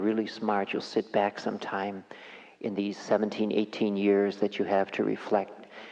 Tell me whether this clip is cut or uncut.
uncut